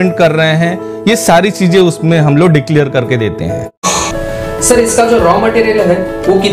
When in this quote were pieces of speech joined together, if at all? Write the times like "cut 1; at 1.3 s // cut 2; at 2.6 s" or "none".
cut 1; at 3.8 s